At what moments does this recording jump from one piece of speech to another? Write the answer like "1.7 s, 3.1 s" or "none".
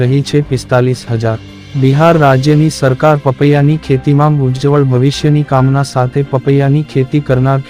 none